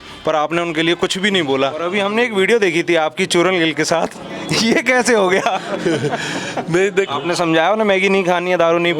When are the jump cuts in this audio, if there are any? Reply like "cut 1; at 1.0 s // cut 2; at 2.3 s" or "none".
cut 1; at 1.8 s // cut 2; at 7.1 s